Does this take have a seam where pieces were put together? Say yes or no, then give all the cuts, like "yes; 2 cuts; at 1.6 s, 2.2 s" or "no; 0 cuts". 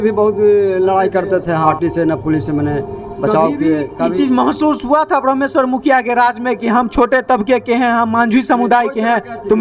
yes; 1 cut; at 1.7 s